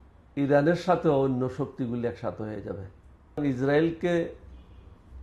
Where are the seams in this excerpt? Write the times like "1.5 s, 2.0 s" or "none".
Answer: 3.4 s